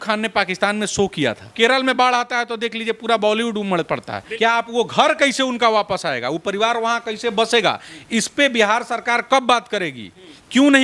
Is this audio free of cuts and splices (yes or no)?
no